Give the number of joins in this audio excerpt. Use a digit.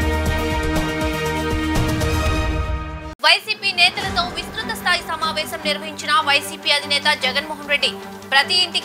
1